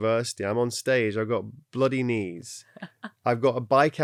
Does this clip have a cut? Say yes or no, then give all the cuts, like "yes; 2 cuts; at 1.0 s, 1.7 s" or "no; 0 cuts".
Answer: no; 0 cuts